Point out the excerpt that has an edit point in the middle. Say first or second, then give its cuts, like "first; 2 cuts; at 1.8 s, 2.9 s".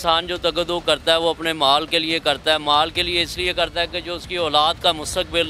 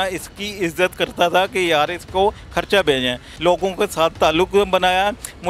second; 1 cut; at 3.3 s